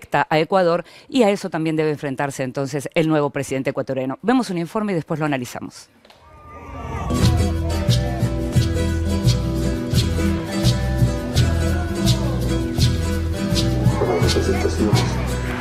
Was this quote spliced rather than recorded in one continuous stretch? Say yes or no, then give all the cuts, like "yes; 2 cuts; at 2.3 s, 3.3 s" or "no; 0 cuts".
no; 0 cuts